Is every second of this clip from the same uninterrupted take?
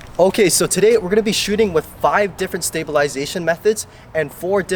yes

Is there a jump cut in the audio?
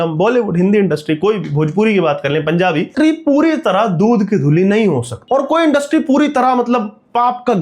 yes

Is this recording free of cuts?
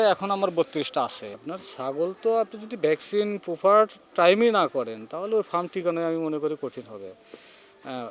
no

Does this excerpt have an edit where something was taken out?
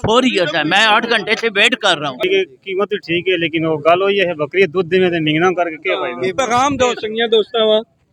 yes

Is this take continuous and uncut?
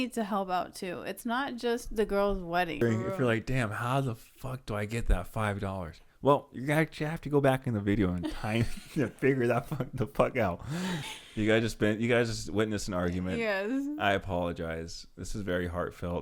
no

